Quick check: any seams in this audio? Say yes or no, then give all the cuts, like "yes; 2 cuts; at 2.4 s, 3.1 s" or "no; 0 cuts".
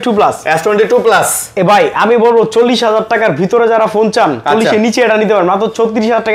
no; 0 cuts